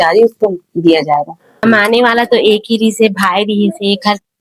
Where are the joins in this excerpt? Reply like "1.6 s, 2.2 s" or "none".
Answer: 1.6 s

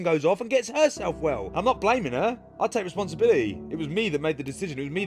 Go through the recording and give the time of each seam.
1.4 s

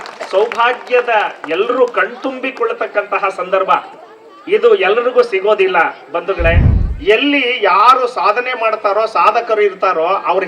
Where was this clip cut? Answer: 6.7 s

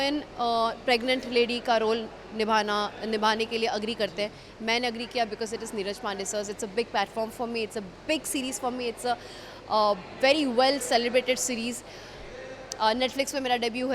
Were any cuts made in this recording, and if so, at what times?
none

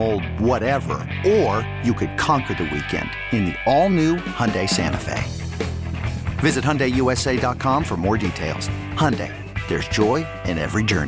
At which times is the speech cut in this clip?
none

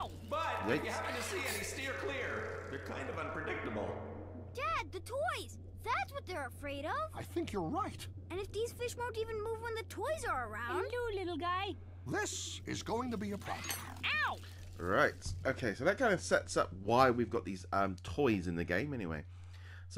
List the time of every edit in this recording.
17.4 s

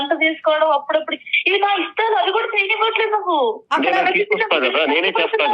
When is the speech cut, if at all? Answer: none

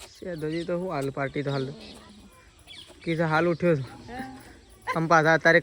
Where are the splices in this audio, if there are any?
none

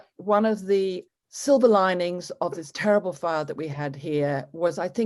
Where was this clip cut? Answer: 1.0 s

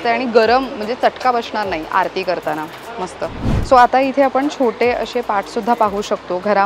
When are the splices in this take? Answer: none

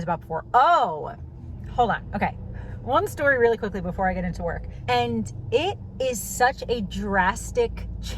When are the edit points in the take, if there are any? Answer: 4.6 s

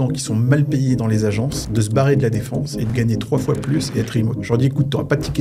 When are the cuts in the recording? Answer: 1.6 s, 2.9 s, 4.4 s

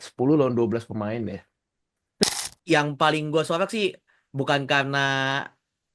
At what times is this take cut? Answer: 2.2 s

